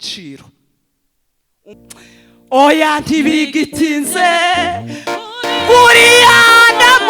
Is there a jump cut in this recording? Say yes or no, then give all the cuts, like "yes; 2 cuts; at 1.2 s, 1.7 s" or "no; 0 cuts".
yes; 1 cut; at 1.6 s